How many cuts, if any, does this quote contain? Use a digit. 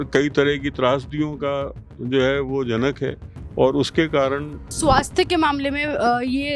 1